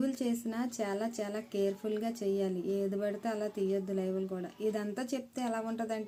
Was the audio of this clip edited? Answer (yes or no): no